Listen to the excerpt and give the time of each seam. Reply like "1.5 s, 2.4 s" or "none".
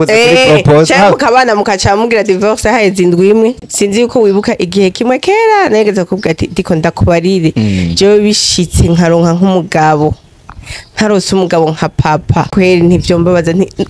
3.6 s, 12.5 s

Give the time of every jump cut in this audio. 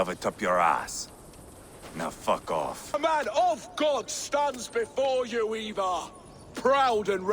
2.9 s

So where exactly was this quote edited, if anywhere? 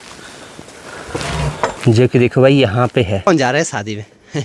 1.8 s, 3.3 s

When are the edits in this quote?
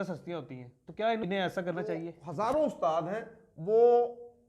1.2 s, 2.2 s

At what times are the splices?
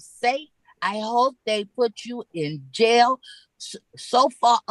none

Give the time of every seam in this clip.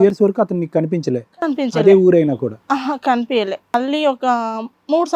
3.7 s

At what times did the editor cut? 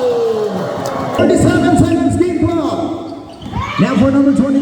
1.0 s

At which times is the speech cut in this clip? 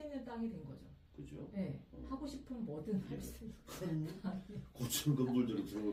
none

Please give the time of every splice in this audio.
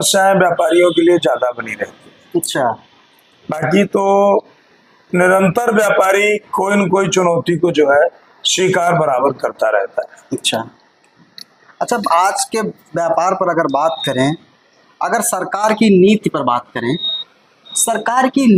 none

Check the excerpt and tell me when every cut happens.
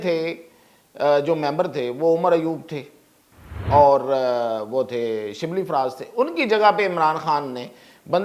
none

